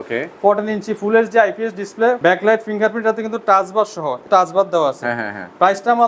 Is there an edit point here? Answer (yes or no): yes